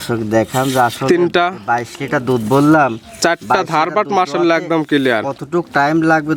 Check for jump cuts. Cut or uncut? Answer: uncut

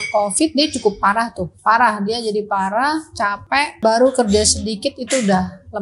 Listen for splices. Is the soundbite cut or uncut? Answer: cut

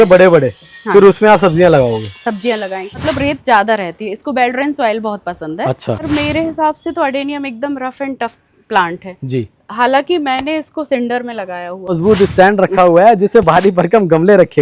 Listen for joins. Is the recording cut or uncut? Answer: cut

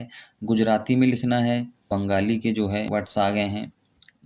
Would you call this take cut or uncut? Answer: cut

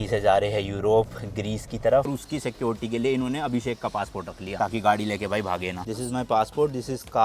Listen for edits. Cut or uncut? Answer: cut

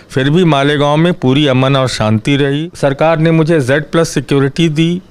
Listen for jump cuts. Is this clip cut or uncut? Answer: cut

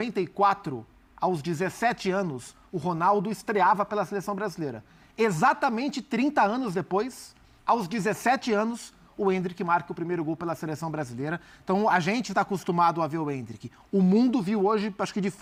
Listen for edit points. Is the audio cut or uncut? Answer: uncut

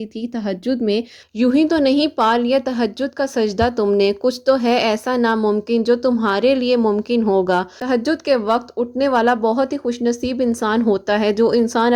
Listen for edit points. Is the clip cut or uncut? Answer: cut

